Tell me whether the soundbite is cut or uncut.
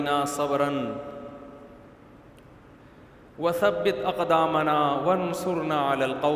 uncut